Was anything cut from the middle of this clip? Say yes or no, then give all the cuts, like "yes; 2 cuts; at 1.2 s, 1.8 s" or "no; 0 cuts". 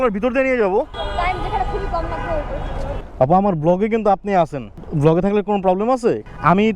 yes; 2 cuts; at 1.0 s, 3.0 s